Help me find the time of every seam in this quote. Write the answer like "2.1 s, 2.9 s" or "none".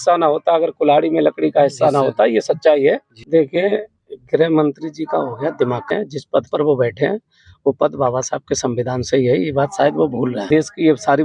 3.1 s, 5.9 s, 10.5 s